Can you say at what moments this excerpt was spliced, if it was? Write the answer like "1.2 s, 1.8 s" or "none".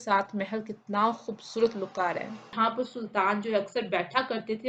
2.5 s